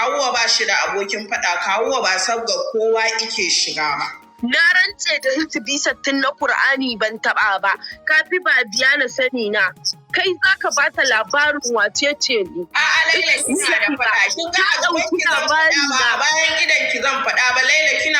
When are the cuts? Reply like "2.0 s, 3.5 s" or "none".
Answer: 4.2 s, 8.1 s